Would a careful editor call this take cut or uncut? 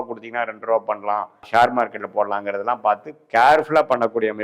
cut